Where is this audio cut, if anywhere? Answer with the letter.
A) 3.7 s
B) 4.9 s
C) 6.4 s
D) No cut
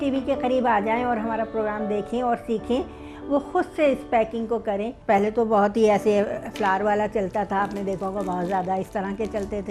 D